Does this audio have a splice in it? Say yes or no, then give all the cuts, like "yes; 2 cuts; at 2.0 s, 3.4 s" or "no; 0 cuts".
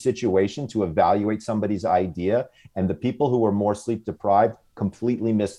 no; 0 cuts